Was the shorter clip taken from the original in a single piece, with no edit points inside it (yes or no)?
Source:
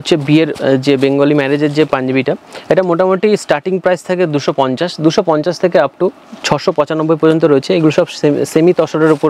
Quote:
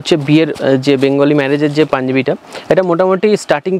yes